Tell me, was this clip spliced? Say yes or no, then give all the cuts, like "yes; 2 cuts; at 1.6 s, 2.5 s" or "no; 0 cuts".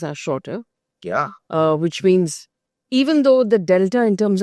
no; 0 cuts